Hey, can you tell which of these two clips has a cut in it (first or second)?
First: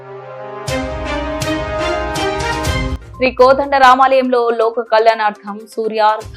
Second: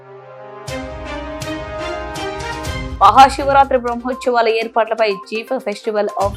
first